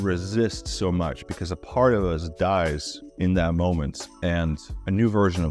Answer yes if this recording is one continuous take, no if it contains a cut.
yes